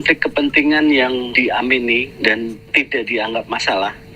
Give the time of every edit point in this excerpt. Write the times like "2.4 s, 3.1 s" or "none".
2.6 s